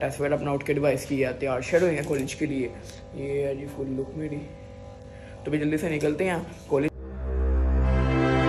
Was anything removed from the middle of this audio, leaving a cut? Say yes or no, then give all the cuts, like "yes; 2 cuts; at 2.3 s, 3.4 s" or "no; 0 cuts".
yes; 1 cut; at 6.9 s